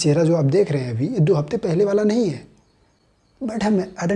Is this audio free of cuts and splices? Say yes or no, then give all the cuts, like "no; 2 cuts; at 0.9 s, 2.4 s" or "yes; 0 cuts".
yes; 0 cuts